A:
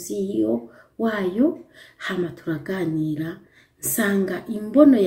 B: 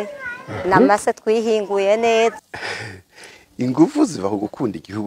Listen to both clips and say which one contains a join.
B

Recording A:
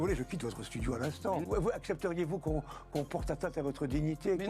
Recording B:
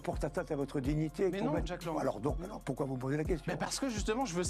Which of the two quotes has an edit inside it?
A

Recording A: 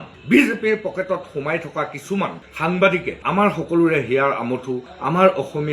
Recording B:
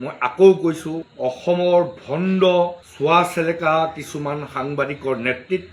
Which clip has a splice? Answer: A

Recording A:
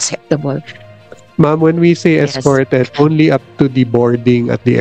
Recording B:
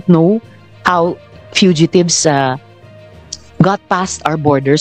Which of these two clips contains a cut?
A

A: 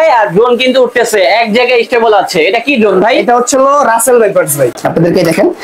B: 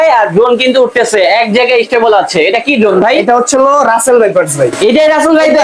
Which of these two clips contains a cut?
A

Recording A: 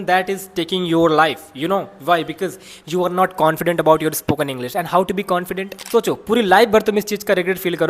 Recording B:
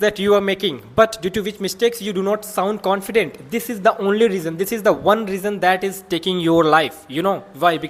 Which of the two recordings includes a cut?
A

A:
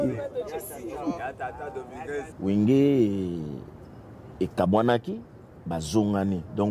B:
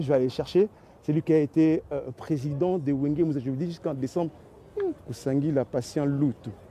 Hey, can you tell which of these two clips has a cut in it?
A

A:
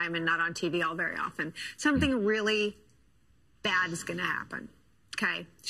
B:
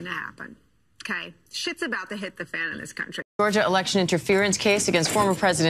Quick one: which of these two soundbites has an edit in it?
B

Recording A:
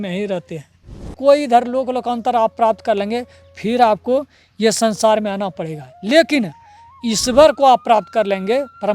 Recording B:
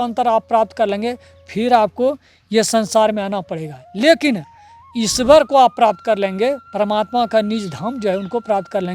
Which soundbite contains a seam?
A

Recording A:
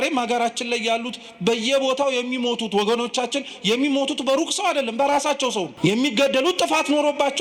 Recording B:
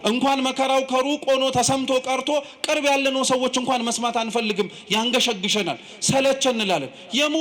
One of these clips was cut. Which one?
A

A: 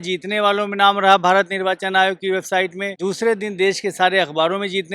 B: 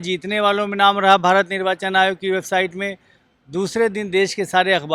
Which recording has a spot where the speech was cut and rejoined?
A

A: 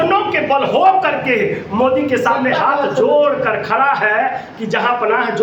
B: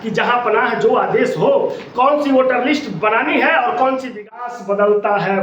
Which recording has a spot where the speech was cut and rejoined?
B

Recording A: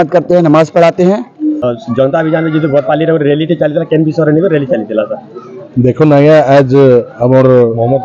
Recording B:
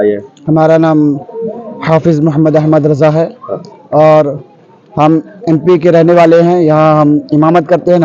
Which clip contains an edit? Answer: A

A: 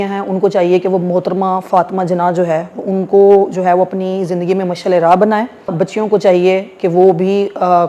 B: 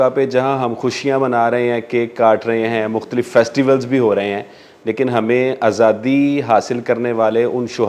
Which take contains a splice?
A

